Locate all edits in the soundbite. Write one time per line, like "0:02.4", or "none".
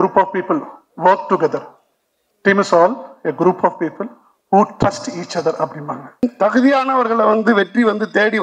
0:06.2